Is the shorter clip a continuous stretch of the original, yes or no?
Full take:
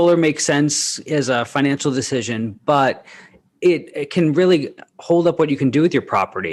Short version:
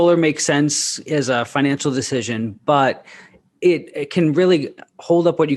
yes